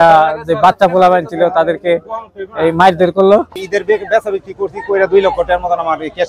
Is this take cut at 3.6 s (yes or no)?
yes